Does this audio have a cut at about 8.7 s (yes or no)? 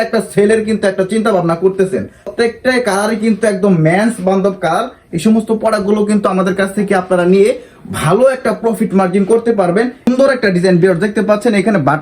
no